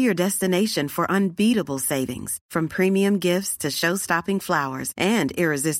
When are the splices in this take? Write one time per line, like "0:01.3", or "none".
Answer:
none